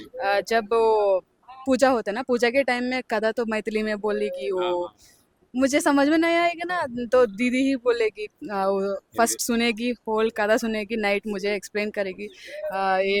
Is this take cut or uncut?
uncut